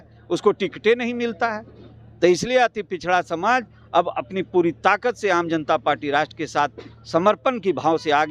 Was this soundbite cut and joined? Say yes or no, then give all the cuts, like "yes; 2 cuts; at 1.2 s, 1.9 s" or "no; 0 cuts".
no; 0 cuts